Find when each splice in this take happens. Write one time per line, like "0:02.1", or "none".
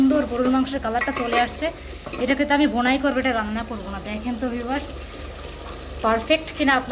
none